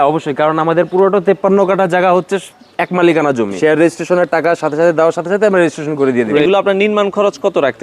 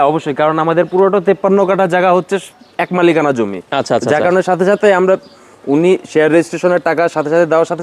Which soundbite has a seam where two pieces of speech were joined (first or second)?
first